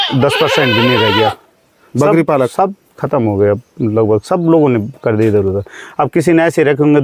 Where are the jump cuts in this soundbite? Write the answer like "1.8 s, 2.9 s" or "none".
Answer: none

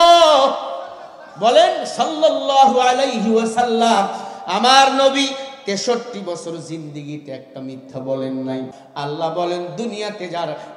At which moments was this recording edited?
8.7 s

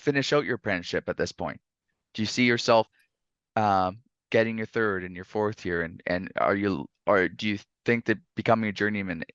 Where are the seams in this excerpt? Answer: none

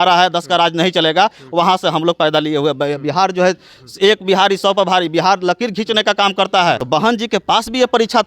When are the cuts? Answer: 6.8 s

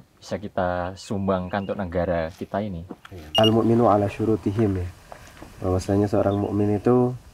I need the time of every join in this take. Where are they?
3.3 s

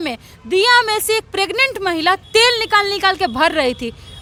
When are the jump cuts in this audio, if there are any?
none

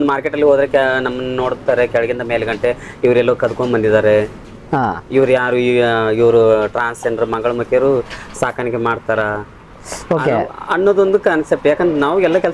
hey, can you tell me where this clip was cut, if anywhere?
none

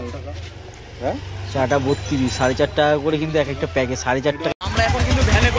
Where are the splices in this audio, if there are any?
4.5 s

